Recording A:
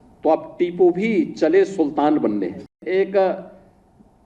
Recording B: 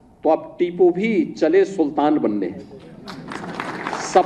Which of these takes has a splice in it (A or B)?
A